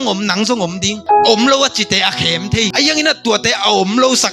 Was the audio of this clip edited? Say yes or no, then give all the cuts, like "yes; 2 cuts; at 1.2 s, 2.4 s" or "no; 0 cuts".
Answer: yes; 2 cuts; at 0.9 s, 2.7 s